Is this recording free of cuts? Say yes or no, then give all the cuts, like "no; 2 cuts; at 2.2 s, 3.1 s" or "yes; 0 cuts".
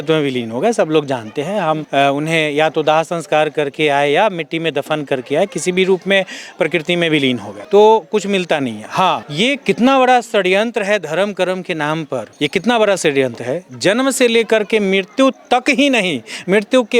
yes; 0 cuts